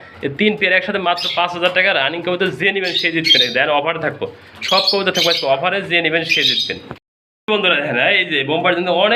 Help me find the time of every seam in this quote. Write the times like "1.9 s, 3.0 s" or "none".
none